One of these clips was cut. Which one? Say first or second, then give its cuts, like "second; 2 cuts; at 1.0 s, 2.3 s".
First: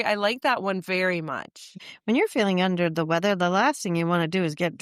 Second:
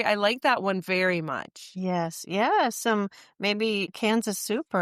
first; 1 cut; at 1.8 s